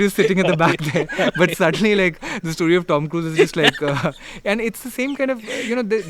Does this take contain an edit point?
no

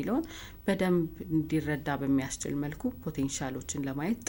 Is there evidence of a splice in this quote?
no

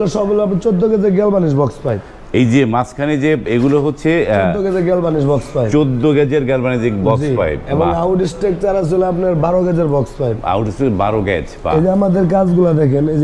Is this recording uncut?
yes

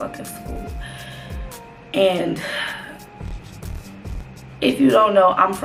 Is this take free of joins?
yes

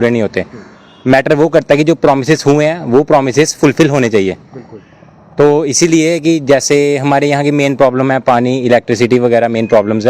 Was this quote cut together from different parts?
no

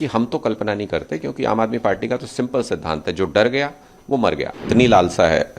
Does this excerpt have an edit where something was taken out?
yes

